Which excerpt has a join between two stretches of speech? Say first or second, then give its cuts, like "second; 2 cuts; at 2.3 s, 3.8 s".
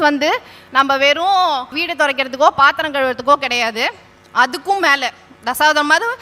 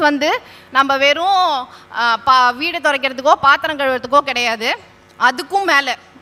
first; 1 cut; at 1.8 s